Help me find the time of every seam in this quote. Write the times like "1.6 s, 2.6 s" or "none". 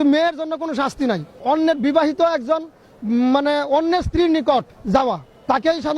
1.3 s, 4.9 s